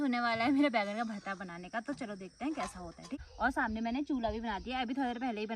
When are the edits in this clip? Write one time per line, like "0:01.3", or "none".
0:03.2